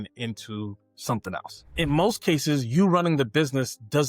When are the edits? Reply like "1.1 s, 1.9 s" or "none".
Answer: 1.7 s